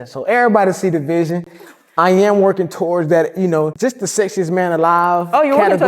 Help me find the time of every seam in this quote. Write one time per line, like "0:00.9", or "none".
0:03.7